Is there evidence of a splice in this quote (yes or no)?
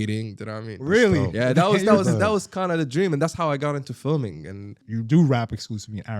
yes